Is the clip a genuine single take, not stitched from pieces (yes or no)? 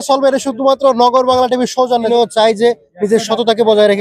no